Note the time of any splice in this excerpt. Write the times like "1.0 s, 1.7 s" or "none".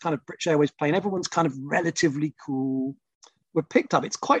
3.0 s